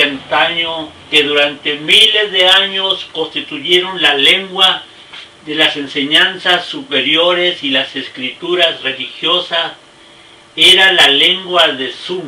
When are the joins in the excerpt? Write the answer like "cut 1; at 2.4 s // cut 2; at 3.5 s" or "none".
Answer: cut 1; at 6.0 s